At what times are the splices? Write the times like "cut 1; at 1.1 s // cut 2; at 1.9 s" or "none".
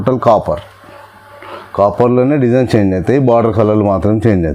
none